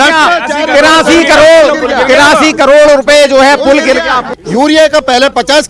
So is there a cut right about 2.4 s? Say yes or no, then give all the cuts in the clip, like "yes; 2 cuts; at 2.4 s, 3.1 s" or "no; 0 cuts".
no; 1 cut; at 4.3 s